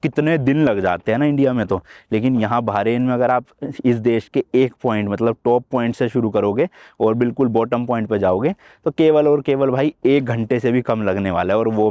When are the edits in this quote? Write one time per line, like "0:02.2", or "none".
none